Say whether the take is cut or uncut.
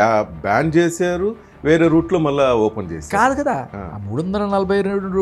uncut